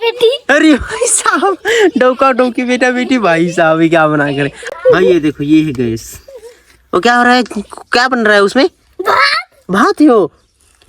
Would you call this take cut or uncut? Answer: cut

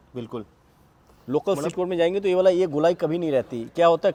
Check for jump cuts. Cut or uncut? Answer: uncut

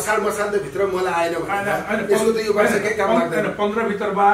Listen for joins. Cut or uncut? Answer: uncut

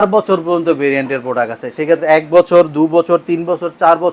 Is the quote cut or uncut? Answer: uncut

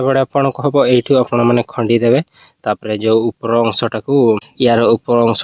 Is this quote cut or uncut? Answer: cut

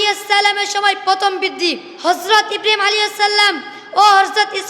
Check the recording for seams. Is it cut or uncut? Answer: cut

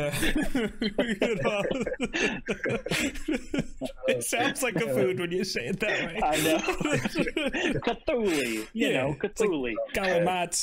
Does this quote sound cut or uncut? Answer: uncut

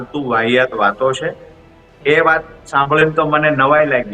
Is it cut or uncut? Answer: uncut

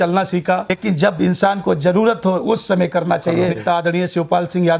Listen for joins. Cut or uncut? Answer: cut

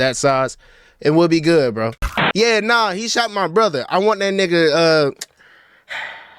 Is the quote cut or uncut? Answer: cut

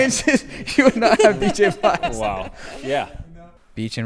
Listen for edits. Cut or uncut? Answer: cut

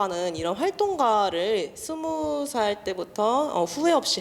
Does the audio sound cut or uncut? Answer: uncut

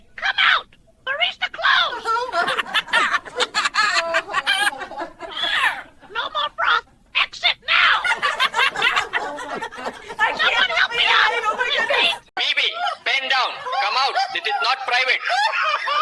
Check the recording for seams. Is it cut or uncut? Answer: uncut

